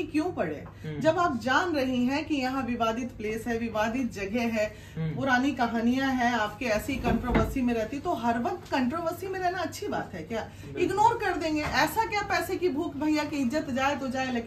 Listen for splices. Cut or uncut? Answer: uncut